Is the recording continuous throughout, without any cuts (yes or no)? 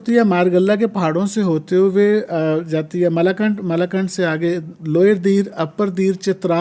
yes